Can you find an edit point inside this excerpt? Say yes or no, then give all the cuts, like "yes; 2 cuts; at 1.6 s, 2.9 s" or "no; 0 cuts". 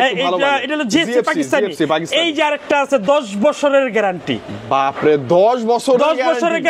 no; 0 cuts